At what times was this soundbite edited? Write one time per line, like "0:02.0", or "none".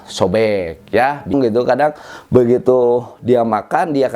0:01.3